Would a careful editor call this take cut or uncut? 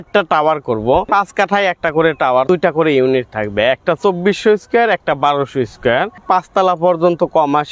cut